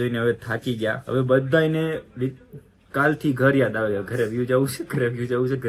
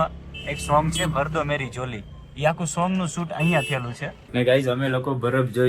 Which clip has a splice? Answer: second; 1 cut; at 4.2 s

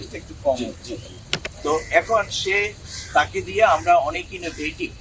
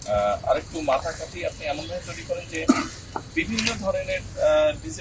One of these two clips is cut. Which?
first; 1 cut; at 1.5 s

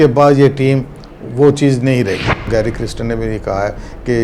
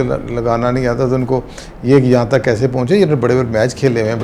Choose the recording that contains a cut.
first; 1 cut; at 2.5 s

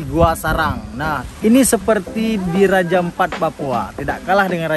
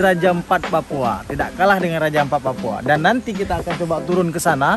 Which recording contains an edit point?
first; 1 cut; at 1.2 s

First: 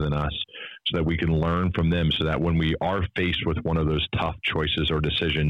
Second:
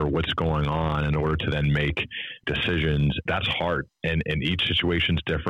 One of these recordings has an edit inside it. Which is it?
second; 2 cuts; at 2.4 s, 3.2 s

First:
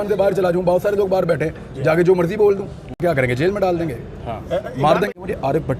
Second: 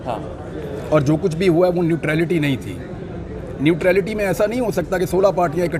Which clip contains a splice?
first; 2 cuts; at 3.0 s, 5.1 s

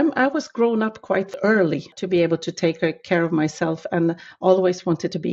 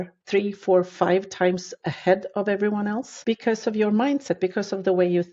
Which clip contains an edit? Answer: first; 1 cut; at 1.7 s

